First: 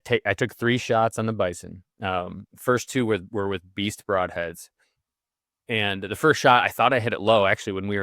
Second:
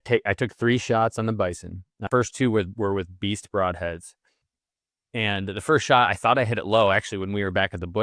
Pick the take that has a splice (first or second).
second